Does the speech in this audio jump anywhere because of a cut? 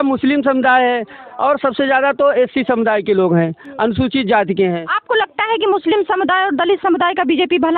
no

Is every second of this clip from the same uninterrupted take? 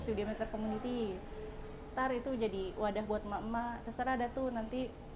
yes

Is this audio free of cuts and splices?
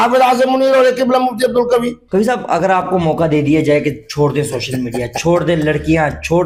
yes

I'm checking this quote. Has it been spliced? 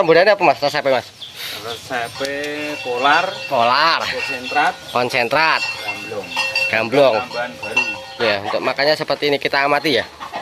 yes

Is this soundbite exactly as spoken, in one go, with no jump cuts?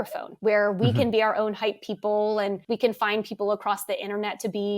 no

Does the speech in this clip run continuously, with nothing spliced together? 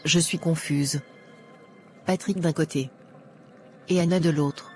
yes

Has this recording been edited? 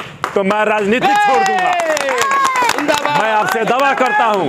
no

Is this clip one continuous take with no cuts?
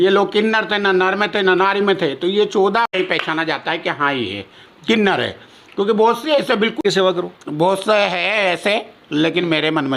no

